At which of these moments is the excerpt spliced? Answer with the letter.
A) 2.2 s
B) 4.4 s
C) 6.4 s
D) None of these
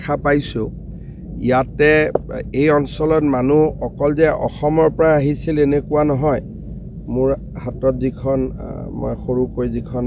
D